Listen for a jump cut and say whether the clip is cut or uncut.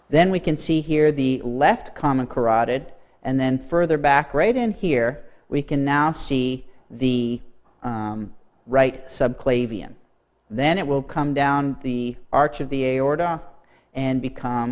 cut